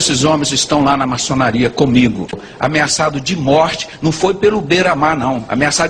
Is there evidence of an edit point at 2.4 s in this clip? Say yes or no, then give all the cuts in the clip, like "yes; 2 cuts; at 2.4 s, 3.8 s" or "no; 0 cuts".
yes; 1 cut; at 2.4 s